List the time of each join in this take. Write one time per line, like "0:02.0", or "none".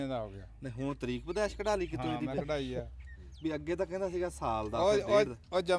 none